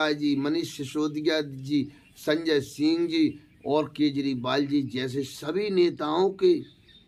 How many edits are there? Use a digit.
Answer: 0